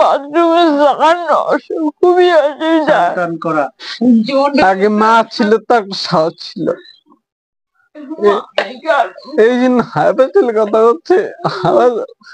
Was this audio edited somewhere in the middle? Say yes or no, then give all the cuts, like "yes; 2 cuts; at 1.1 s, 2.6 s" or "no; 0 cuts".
yes; 1 cut; at 3.8 s